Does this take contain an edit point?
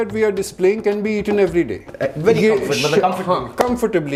no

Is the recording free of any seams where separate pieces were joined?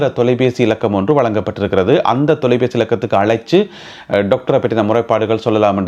yes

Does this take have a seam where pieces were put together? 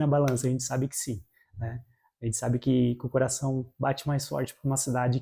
no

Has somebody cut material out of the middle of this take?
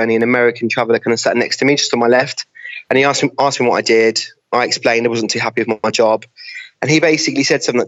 yes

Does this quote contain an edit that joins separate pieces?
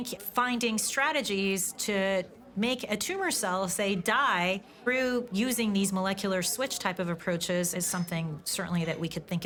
no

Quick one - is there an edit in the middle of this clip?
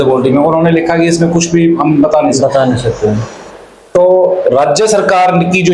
no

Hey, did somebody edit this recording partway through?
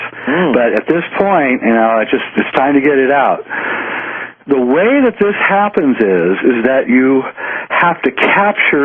yes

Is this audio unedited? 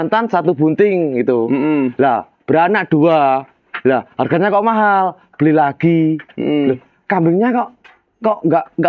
yes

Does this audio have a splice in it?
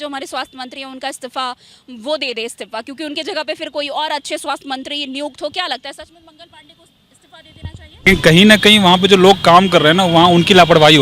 yes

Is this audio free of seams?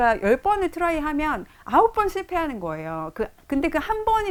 yes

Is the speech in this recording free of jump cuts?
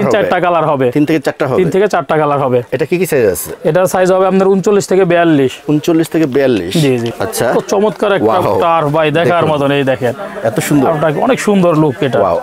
no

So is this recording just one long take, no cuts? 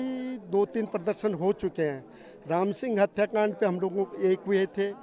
yes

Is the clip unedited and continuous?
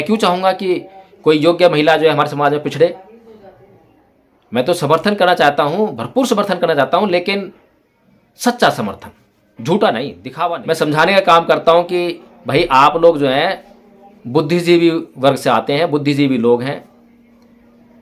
no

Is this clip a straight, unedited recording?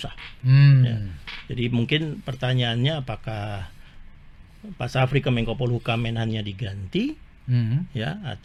yes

